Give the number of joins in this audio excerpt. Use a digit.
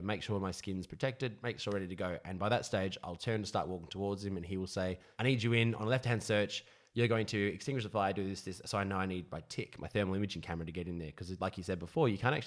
1